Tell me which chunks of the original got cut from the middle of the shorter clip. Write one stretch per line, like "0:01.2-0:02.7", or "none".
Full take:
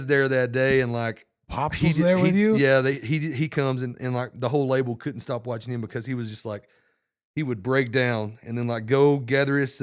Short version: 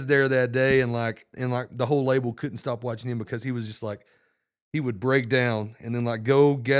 0:01.3-0:03.9